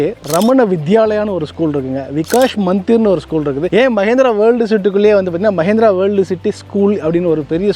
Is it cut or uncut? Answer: uncut